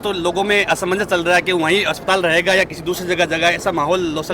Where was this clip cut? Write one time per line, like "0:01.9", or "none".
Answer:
none

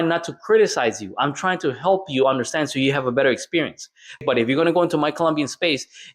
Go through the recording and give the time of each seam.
0:04.2

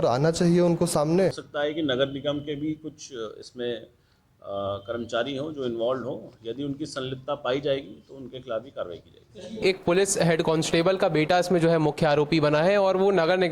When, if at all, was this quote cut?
0:01.5
0:09.6

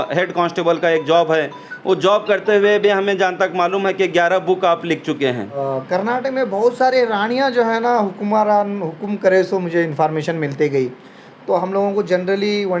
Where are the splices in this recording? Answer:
0:05.6

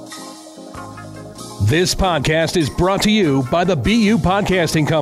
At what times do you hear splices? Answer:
0:01.6

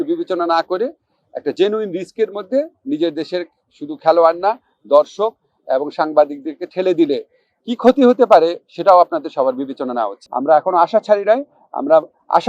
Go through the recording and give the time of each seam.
0:10.2

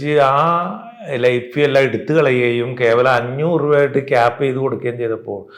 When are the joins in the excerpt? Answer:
none

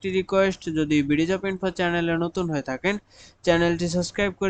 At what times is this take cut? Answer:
none

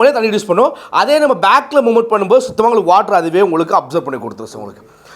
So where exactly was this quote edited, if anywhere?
none

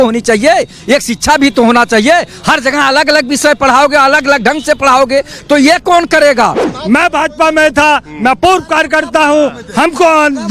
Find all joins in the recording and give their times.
0:06.7

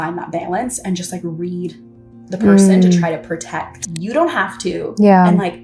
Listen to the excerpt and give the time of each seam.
0:03.9

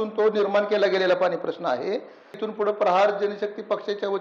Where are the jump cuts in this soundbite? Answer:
0:02.4

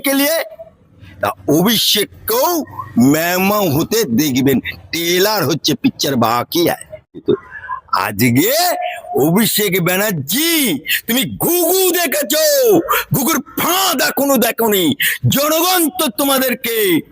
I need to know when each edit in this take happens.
0:01.1
0:07.2

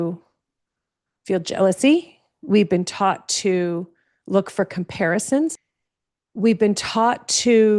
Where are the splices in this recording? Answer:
0:05.5

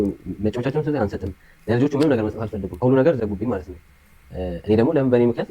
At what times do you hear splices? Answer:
0:02.7

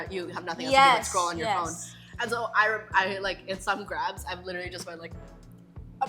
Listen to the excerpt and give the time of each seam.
none

